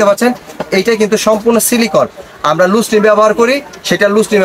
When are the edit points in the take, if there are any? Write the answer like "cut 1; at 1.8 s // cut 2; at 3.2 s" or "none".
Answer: none